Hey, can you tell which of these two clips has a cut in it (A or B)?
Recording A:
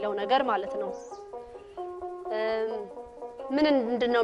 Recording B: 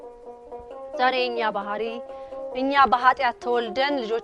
B